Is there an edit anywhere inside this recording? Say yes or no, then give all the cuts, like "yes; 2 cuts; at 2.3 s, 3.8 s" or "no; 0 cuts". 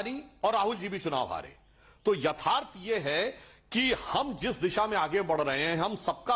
no; 0 cuts